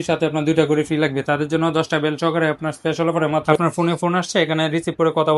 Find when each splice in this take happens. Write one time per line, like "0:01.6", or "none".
0:03.5